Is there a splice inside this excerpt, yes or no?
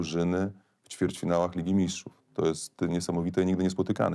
no